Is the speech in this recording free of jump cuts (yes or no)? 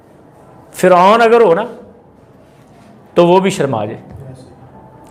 yes